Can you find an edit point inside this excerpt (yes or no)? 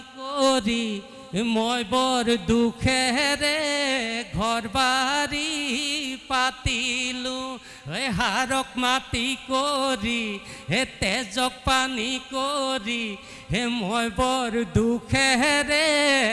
no